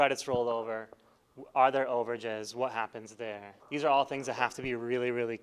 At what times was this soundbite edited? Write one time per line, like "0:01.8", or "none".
0:03.5